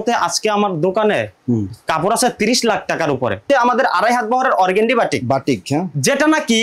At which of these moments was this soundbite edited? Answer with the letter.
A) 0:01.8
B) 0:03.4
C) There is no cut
B